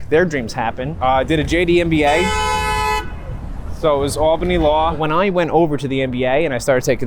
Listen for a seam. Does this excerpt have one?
yes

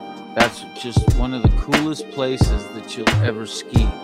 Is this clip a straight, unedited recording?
yes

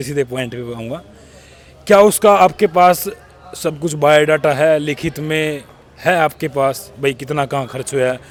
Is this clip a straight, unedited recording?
yes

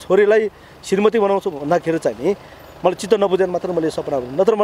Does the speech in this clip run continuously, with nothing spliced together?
yes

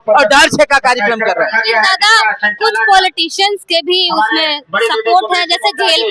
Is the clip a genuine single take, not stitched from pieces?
yes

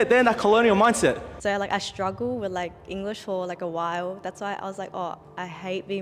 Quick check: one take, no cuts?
no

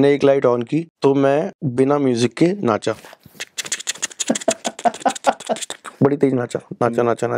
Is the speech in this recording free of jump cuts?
no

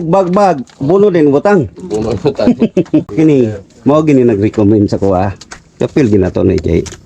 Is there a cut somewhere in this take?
yes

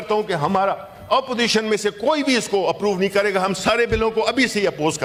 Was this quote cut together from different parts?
no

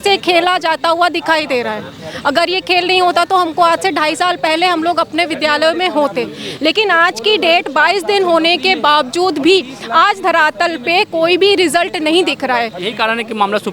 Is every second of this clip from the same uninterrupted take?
yes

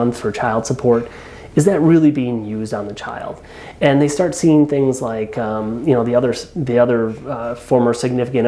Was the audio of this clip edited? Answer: no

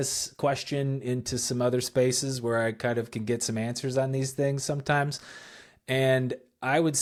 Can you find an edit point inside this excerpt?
no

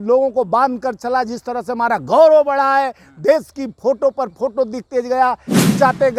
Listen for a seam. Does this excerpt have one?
no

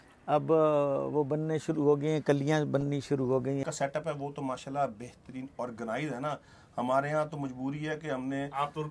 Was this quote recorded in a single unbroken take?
no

